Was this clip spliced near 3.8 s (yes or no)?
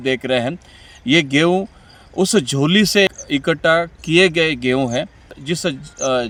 no